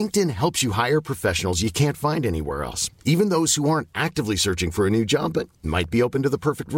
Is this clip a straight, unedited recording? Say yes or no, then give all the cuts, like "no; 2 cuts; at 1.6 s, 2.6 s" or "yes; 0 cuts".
yes; 0 cuts